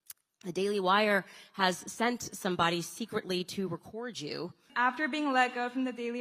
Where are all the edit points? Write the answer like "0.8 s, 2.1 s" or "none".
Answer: 4.7 s